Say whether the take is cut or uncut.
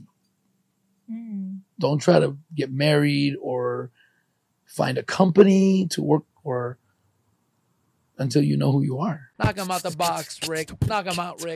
cut